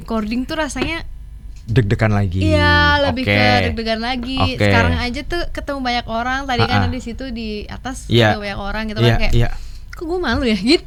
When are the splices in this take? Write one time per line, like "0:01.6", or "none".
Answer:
none